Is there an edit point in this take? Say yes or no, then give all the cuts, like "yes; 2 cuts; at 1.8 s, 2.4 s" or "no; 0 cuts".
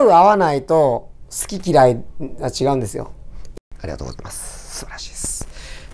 yes; 1 cut; at 3.4 s